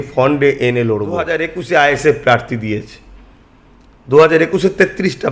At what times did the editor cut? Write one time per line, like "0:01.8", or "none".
0:01.4